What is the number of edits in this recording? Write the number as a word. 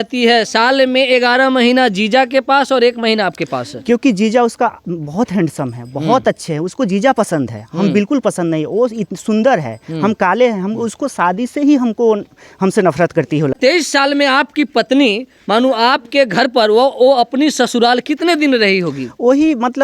one